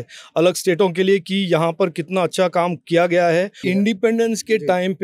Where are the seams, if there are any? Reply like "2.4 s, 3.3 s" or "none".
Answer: 3.6 s